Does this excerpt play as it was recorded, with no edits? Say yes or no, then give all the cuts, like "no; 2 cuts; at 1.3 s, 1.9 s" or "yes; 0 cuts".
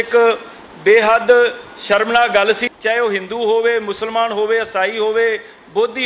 no; 1 cut; at 2.7 s